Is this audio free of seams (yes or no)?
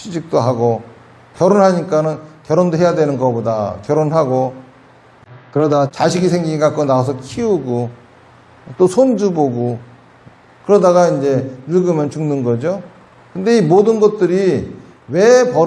yes